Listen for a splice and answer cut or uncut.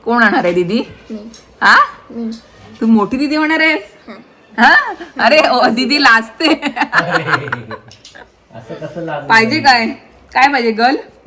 uncut